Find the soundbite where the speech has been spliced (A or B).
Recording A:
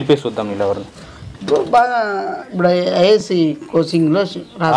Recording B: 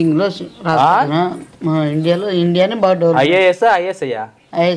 A